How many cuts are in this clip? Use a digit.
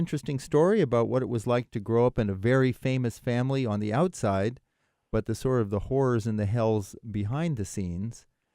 1